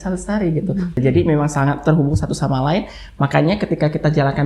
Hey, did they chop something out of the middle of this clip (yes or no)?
yes